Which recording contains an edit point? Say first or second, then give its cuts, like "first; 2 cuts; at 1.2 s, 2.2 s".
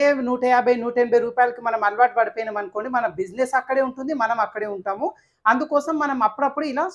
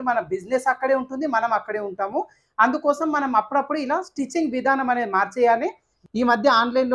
second; 1 cut; at 5.9 s